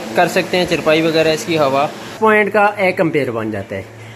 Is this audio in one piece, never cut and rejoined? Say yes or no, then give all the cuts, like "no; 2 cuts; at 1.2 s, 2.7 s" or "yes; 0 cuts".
no; 1 cut; at 2.1 s